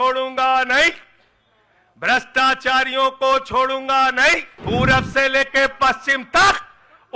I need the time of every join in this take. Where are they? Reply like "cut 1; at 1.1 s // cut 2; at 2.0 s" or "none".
cut 1; at 4.5 s